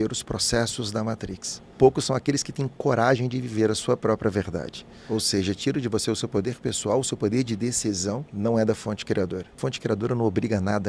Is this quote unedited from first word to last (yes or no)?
no